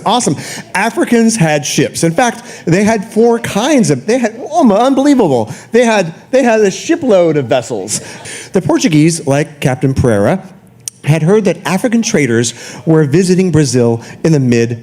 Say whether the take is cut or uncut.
cut